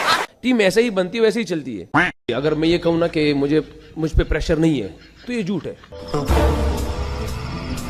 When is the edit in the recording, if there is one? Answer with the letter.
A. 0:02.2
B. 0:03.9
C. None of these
A